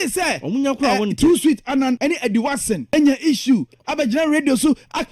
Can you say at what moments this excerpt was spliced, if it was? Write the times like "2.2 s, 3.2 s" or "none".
2.0 s, 2.8 s